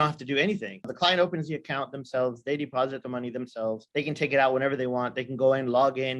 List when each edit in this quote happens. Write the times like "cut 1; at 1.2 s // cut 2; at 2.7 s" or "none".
cut 1; at 0.9 s